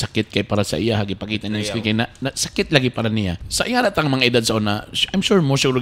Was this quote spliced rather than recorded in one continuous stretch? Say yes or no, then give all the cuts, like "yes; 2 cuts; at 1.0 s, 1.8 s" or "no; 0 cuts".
yes; 1 cut; at 3.4 s